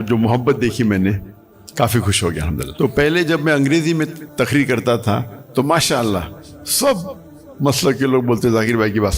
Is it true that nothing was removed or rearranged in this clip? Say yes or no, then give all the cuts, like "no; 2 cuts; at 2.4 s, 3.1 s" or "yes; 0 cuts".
no; 2 cuts; at 2.7 s, 4.2 s